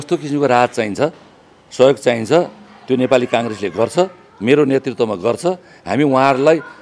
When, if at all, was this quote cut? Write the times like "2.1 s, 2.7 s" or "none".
none